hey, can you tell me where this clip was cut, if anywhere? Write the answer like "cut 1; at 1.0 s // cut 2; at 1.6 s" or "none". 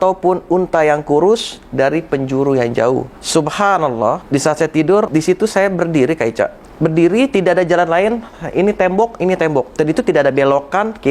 cut 1; at 3.2 s // cut 2; at 4.2 s // cut 3; at 5.1 s // cut 4; at 6.6 s // cut 5; at 9.7 s

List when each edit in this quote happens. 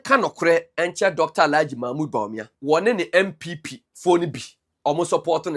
cut 1; at 2.5 s

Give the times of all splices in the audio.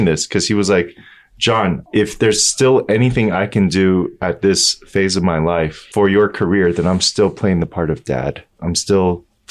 cut 1; at 1.8 s // cut 2; at 5.8 s // cut 3; at 8.5 s

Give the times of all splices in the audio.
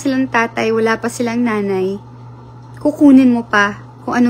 none

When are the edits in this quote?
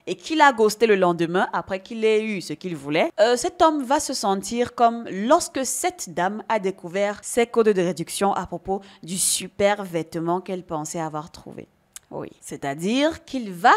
none

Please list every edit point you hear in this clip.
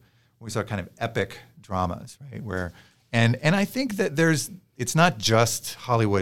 none

